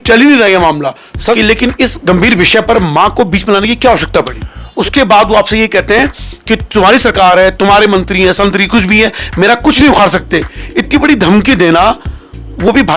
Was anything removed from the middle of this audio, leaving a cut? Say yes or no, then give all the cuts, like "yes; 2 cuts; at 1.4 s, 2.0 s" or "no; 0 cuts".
yes; 2 cuts; at 1.4 s, 4.8 s